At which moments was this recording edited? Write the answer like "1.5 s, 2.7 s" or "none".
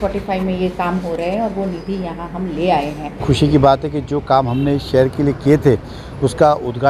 3.2 s